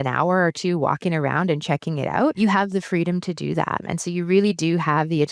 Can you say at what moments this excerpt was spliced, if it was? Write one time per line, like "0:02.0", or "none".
0:02.3
0:03.8